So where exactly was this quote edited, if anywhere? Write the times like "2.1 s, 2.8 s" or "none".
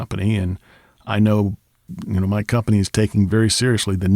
1.8 s